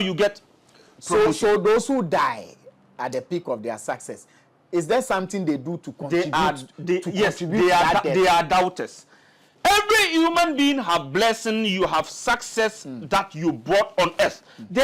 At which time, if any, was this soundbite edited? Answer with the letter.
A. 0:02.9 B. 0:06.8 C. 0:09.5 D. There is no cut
C